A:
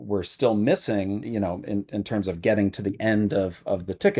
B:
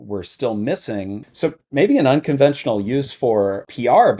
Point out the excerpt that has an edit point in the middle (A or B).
B